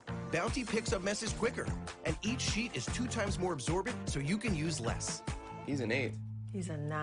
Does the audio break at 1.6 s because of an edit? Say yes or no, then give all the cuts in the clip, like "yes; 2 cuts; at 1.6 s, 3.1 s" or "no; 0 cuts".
no; 1 cut; at 4.0 s